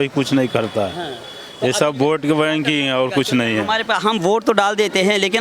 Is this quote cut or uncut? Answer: uncut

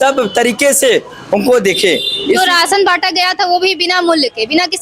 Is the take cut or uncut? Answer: uncut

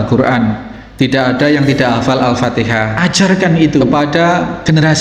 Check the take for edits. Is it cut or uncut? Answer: cut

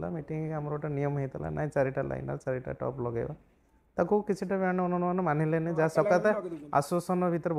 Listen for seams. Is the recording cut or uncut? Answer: uncut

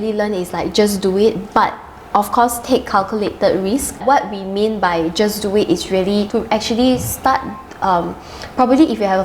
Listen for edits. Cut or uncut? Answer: cut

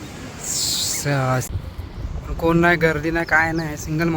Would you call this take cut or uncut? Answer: cut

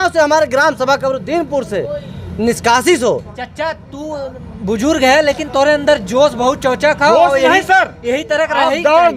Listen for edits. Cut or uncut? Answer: cut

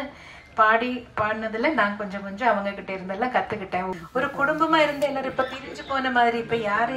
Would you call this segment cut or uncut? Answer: cut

